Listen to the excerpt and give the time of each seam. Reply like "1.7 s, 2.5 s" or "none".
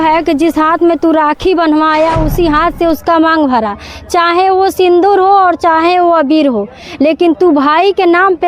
none